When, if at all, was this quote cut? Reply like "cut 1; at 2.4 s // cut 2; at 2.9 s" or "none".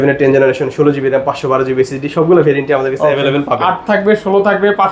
none